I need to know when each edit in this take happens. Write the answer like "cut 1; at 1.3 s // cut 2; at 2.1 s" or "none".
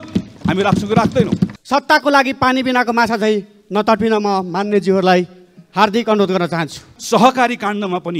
cut 1; at 1.5 s // cut 2; at 6.9 s